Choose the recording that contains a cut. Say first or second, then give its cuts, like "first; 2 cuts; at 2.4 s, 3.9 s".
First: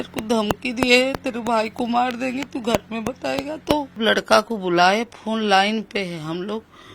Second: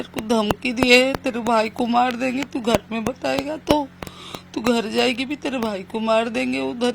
first; 1 cut; at 4.0 s